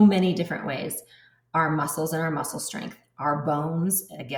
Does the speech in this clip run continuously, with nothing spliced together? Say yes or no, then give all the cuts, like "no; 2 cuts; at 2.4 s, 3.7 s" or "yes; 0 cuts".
yes; 0 cuts